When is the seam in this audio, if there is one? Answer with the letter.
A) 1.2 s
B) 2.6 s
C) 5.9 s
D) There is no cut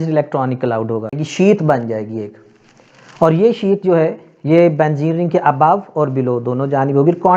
A